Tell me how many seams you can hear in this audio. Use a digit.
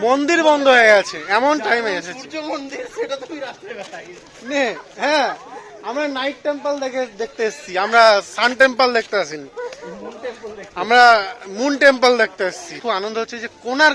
1